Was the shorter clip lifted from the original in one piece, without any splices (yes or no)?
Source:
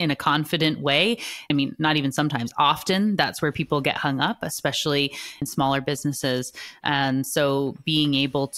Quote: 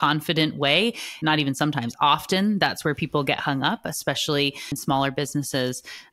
no